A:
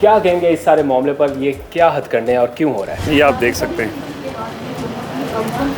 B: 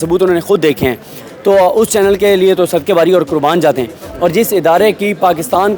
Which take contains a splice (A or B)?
A